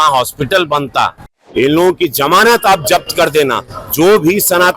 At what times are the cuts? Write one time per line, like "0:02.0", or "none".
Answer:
0:01.4